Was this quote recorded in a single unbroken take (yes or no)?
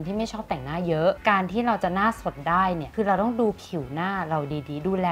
yes